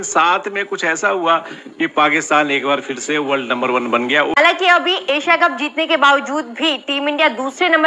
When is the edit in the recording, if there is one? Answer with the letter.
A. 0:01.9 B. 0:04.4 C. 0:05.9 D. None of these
B